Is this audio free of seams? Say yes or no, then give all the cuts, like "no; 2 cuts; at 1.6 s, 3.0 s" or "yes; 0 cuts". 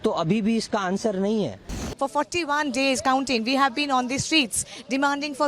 no; 1 cut; at 1.8 s